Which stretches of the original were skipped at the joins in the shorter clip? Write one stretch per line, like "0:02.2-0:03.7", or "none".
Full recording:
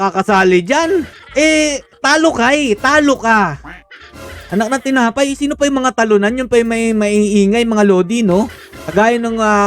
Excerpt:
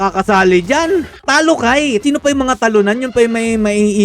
0:01.2-0:01.9
0:02.8-0:05.4